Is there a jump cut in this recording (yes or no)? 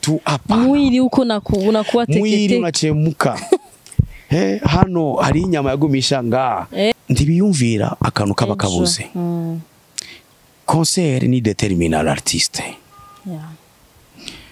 yes